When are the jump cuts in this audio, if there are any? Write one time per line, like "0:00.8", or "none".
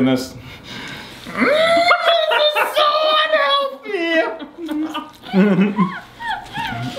none